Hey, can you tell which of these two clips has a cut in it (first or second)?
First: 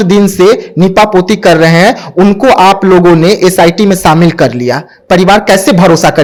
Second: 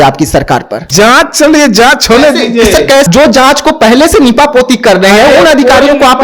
second